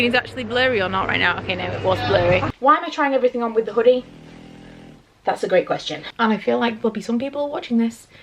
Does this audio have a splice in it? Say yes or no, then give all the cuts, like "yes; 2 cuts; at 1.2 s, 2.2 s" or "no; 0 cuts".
yes; 2 cuts; at 2.5 s, 6.0 s